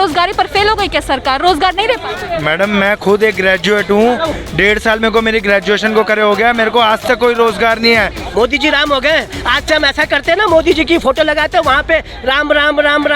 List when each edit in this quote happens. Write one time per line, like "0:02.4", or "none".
0:08.2